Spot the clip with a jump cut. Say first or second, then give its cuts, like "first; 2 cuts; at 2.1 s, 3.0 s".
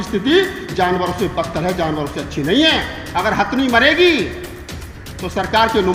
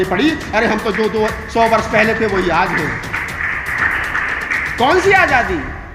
second; 1 cut; at 3.8 s